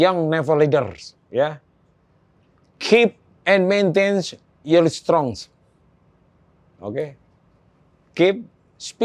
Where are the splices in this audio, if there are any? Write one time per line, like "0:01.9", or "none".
none

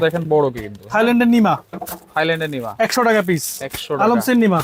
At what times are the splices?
none

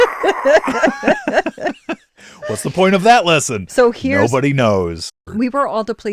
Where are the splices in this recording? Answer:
0:05.1

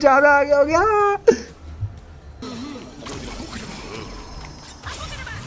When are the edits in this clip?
0:02.4

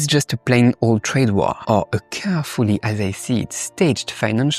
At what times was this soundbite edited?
0:01.6

